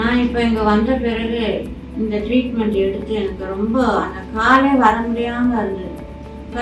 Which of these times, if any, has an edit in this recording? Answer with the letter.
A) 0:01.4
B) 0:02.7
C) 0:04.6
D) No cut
D